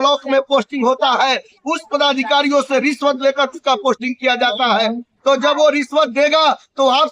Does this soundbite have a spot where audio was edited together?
no; 0 cuts

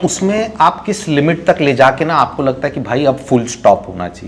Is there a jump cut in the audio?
no; 0 cuts

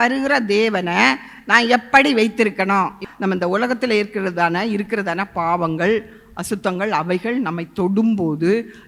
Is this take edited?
yes; 1 cut; at 3.0 s

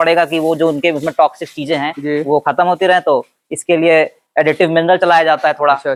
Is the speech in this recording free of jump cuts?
yes; 0 cuts

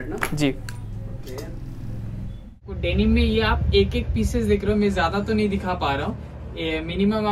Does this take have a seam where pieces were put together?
yes; 1 cut; at 2.8 s

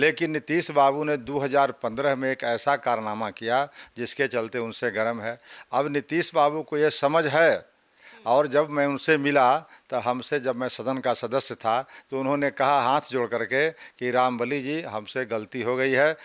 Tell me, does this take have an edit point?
no; 0 cuts

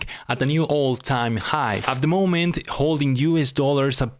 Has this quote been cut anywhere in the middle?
yes; 1 cut; at 1.8 s

